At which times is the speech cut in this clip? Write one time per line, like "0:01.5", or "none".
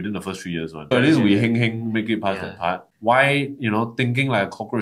0:00.9
0:02.9